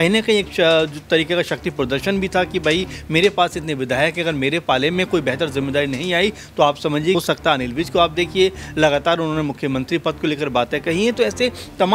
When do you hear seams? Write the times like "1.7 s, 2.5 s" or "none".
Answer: 7.1 s